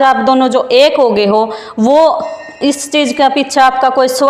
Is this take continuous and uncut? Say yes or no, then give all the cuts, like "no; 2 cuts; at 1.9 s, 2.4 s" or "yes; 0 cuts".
yes; 0 cuts